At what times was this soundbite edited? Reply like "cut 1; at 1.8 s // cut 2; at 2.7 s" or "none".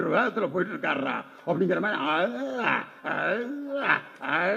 none